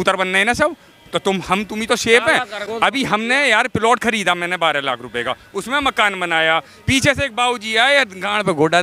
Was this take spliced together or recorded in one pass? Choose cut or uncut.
uncut